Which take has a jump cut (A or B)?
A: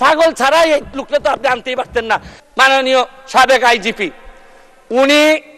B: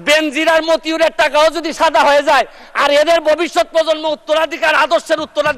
A